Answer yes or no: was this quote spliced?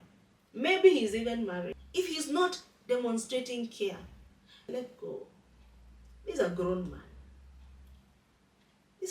yes